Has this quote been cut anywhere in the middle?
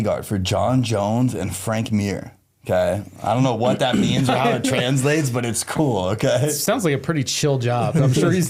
no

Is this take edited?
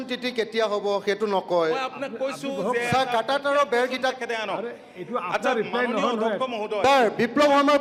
no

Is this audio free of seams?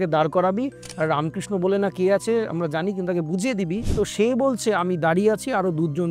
no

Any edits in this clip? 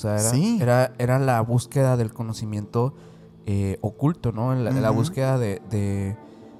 no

